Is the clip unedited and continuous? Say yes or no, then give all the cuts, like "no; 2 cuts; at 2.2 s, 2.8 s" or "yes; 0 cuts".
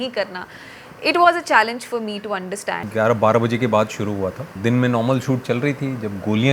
no; 2 cuts; at 2.8 s, 4.5 s